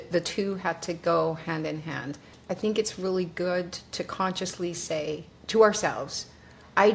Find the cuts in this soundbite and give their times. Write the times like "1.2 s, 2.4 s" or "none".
2.3 s, 5.3 s